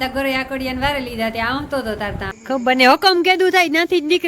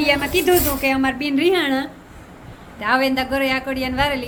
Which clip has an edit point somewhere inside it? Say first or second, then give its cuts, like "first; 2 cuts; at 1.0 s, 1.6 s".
first; 1 cut; at 2.3 s